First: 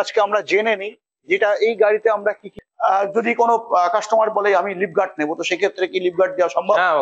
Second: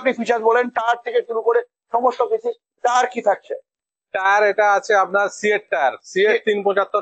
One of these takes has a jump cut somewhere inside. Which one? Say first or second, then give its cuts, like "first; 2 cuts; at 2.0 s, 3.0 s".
first; 1 cut; at 2.5 s